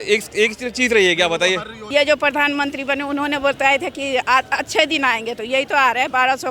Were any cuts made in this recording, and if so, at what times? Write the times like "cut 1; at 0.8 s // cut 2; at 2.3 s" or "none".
cut 1; at 1.9 s